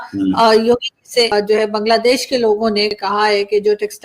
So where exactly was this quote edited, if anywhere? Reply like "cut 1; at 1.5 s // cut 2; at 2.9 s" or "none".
cut 1; at 1.3 s // cut 2; at 2.9 s